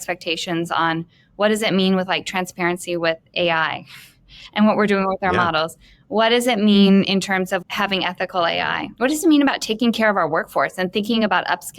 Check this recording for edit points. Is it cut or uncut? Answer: cut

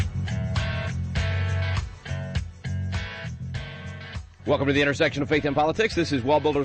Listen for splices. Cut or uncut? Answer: uncut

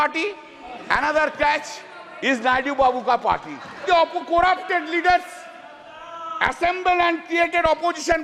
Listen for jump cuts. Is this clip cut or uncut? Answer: cut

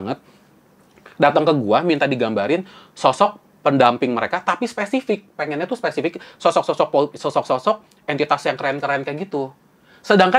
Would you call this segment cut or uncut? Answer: uncut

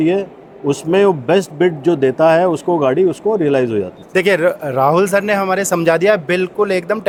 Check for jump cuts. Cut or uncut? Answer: uncut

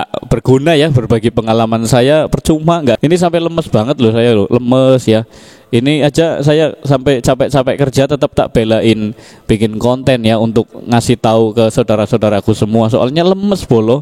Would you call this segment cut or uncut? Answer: cut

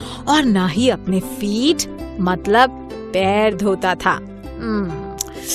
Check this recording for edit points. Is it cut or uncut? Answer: uncut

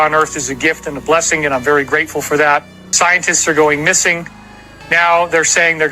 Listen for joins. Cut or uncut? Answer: cut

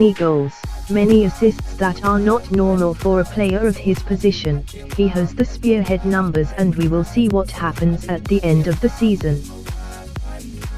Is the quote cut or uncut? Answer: cut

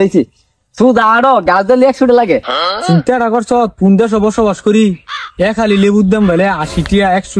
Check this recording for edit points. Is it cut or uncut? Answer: cut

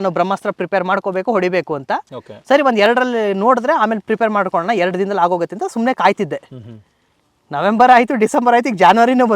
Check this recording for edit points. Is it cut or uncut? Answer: uncut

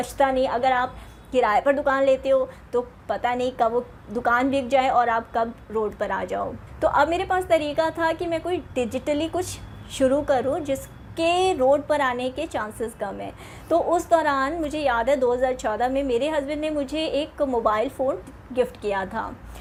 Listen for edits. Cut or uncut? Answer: uncut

